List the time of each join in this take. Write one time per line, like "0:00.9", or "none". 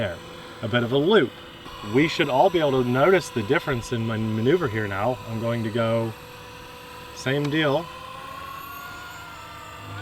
0:01.8